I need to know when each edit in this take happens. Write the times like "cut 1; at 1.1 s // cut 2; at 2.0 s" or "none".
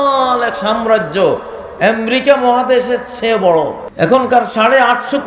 cut 1; at 3.8 s